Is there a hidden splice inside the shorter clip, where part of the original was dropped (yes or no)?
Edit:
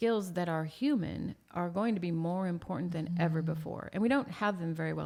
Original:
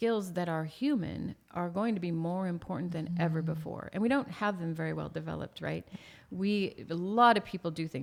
no